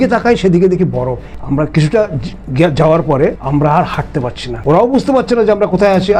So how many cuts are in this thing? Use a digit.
3